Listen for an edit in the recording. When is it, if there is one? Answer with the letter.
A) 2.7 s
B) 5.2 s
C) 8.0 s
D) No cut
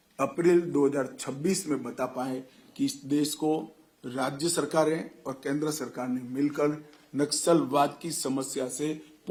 D